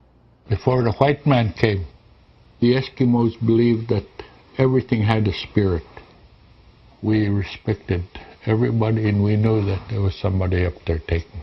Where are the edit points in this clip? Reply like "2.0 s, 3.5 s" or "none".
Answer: 9.1 s